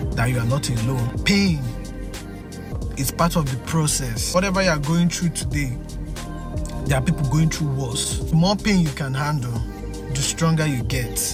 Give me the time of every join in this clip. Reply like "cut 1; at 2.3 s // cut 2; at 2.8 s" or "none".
none

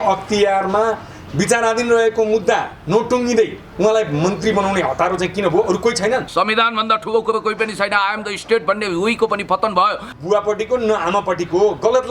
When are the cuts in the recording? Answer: cut 1; at 6.3 s // cut 2; at 10.1 s

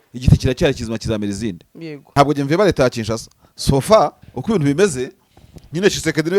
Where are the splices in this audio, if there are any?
cut 1; at 1.9 s

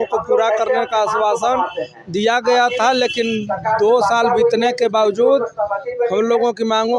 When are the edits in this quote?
none

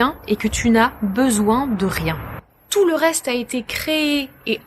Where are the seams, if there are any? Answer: cut 1; at 2.3 s

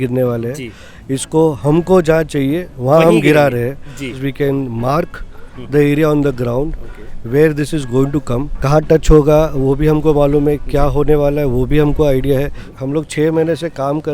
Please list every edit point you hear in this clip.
cut 1; at 4.2 s // cut 2; at 8.5 s // cut 3; at 12.7 s

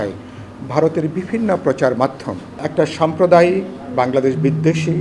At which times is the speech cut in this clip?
cut 1; at 2.7 s

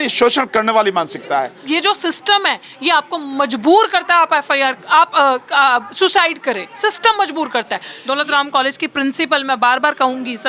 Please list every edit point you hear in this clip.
cut 1; at 1.6 s // cut 2; at 7.9 s

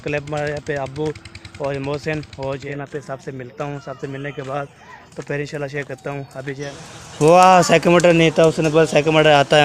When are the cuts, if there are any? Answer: cut 1; at 2.6 s // cut 2; at 6.7 s

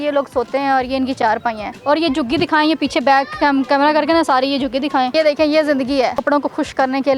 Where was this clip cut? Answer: cut 1; at 1.7 s // cut 2; at 5.1 s // cut 3; at 6.2 s

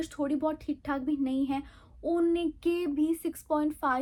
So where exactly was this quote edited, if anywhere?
none

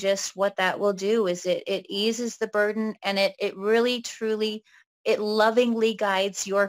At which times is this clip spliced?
none

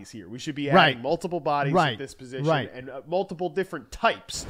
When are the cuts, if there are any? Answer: none

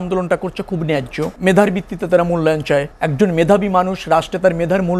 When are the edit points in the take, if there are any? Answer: cut 1; at 1.3 s // cut 2; at 2.9 s

